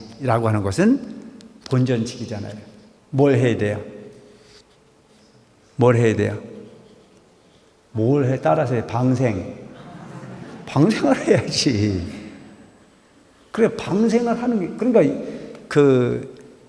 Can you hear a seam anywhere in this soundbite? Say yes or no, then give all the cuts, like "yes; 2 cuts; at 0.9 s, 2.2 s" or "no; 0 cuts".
no; 0 cuts